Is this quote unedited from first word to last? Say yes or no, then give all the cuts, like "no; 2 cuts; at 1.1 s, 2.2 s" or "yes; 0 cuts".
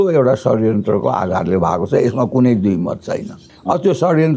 no; 1 cut; at 3.5 s